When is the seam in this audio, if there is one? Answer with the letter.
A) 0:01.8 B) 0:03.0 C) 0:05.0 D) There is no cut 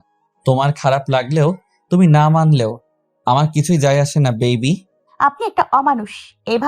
C